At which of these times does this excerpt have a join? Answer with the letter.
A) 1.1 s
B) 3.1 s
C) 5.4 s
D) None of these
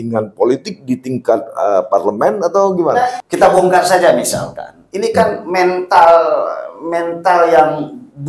B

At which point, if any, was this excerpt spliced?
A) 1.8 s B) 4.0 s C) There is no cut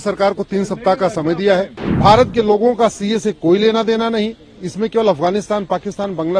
A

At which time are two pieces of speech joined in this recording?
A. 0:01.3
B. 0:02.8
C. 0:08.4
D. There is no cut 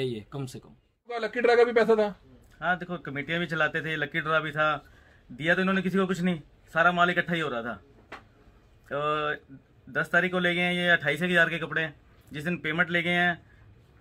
A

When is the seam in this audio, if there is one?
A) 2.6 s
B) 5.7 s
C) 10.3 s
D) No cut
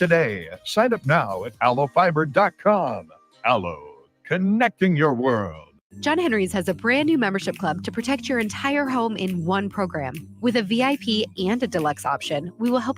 B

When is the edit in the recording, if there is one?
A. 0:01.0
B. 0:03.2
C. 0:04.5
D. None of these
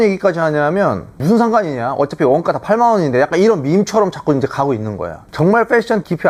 D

